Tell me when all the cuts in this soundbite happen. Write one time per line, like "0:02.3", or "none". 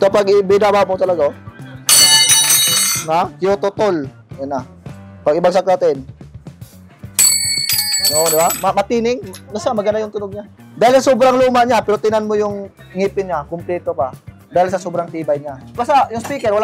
none